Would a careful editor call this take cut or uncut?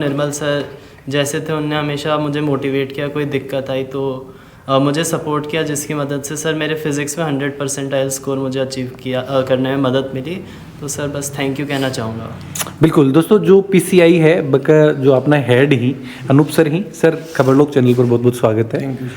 uncut